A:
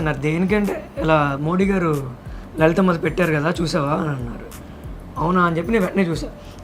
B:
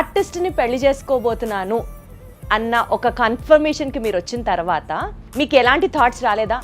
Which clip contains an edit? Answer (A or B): B